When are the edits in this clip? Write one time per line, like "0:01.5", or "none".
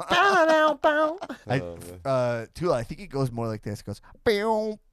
0:01.1

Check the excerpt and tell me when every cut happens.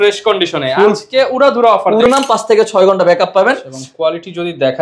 0:02.1

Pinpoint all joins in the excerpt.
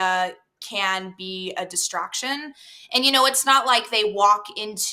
none

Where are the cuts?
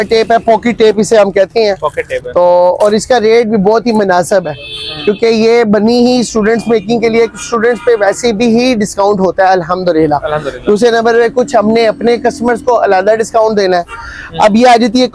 none

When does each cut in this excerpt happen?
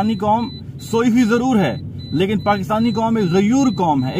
none

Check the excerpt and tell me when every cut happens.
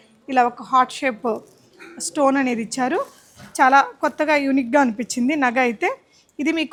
none

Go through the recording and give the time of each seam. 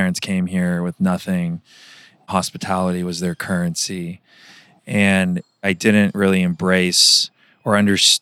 none

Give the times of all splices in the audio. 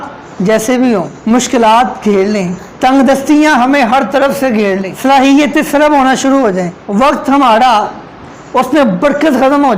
0:01.1
0:02.6
0:04.9
0:06.8

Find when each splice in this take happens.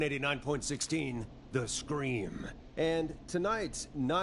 0:03.2

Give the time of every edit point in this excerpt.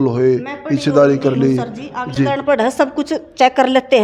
none

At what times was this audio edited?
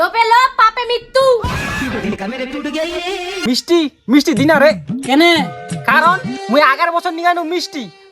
0:03.3

